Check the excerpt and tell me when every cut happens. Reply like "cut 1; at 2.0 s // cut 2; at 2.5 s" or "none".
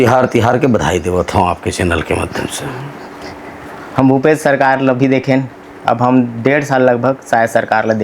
none

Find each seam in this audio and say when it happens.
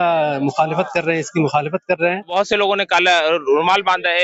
cut 1; at 2.3 s

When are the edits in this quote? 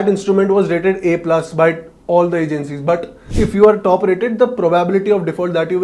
cut 1; at 3.2 s

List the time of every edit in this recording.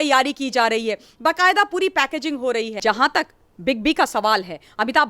cut 1; at 2.8 s

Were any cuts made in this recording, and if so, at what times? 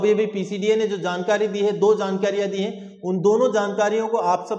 none

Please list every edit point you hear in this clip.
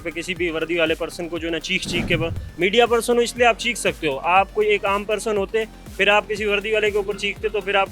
none

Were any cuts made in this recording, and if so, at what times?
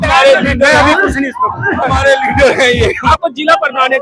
cut 1; at 3.0 s

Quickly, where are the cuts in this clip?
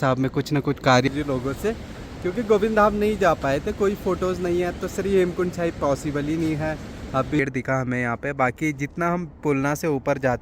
cut 1; at 1.1 s // cut 2; at 7.4 s

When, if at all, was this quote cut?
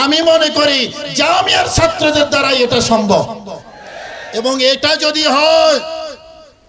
none

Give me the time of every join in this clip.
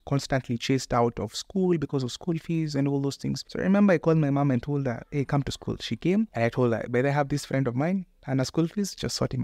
cut 1; at 3.4 s // cut 2; at 6.3 s

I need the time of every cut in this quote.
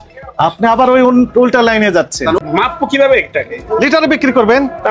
cut 1; at 2.4 s

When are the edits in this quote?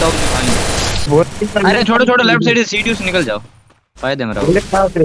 cut 1; at 1.1 s

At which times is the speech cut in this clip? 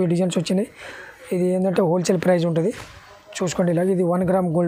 none

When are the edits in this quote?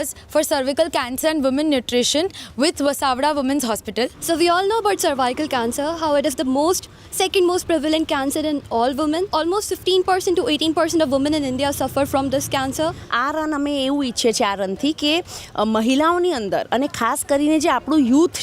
cut 1; at 4.2 s // cut 2; at 9.3 s // cut 3; at 13.1 s

